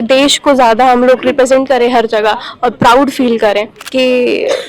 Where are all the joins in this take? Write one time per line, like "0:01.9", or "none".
0:03.8